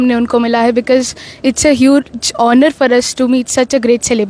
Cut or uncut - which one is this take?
uncut